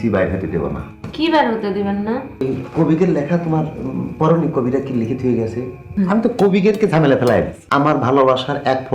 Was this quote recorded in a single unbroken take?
no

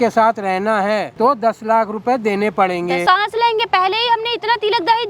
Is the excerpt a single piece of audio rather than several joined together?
no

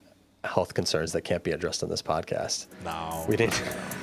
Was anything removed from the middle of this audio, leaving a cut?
no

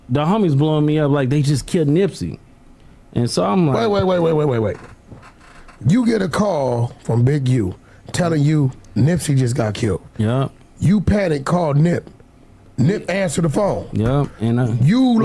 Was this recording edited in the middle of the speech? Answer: no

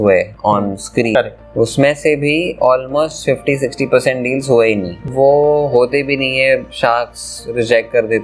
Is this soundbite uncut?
no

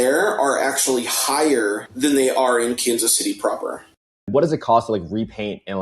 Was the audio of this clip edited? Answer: yes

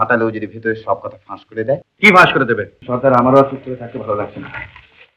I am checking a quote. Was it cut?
yes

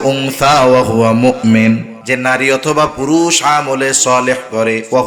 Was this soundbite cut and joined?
yes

